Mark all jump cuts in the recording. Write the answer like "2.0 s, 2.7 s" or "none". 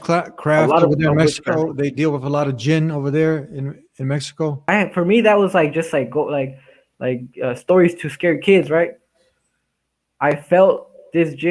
4.7 s